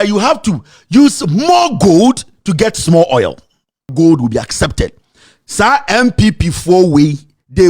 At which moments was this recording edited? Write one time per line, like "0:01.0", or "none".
0:03.9